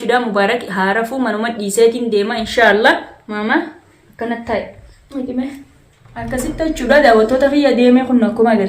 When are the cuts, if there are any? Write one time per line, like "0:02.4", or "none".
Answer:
0:06.4